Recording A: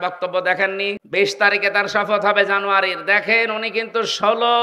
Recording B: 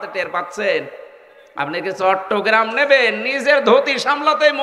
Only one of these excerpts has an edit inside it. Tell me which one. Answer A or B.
A